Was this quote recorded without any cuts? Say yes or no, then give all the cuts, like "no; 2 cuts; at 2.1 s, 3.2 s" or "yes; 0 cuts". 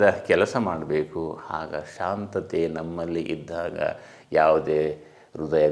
yes; 0 cuts